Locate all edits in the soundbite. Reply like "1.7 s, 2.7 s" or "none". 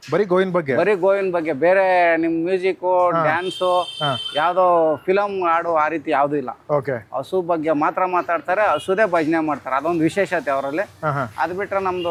none